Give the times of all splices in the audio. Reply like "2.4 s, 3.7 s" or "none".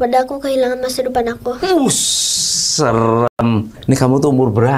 none